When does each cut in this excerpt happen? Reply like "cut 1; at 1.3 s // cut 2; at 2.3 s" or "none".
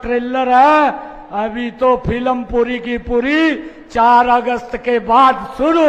none